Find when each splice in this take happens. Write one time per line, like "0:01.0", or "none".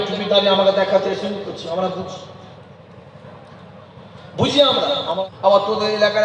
0:05.1